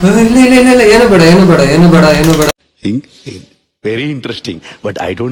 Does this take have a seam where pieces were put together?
no; 0 cuts

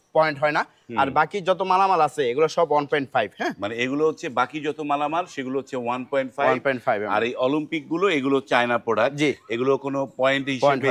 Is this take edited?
no; 0 cuts

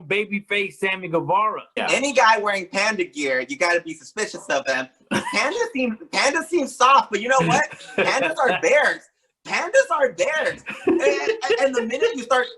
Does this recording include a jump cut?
yes; 1 cut; at 1.8 s

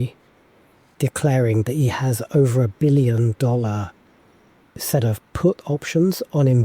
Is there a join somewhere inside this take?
yes; 1 cut; at 0.9 s

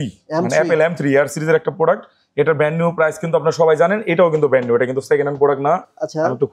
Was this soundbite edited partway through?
no; 0 cuts

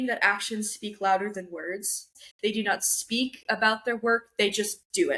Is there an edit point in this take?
yes; 1 cut; at 2.1 s

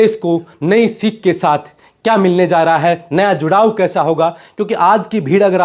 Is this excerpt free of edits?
yes; 0 cuts

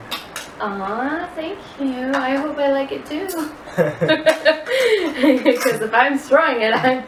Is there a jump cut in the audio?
no; 0 cuts

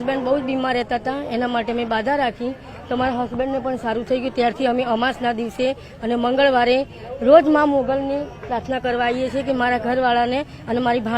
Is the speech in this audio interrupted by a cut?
no; 0 cuts

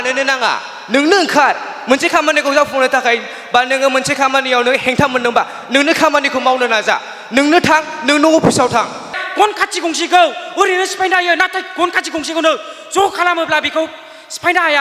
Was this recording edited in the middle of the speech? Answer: yes; 1 cut; at 9.1 s

